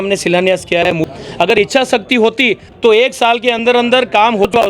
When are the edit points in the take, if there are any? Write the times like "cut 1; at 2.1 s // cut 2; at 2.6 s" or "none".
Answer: cut 1; at 1.1 s